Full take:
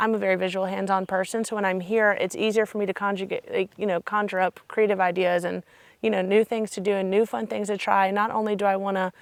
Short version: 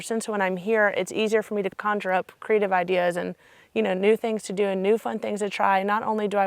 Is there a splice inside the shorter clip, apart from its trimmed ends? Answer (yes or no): yes